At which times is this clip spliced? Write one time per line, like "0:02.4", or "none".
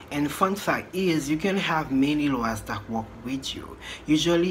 none